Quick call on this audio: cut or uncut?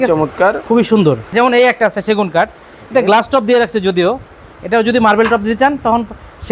cut